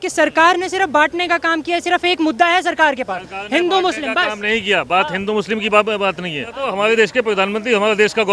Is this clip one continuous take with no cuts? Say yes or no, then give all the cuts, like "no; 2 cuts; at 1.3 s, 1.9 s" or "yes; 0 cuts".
no; 1 cut; at 6.6 s